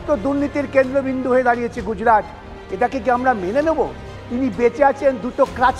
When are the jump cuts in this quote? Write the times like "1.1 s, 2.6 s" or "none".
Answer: 4.1 s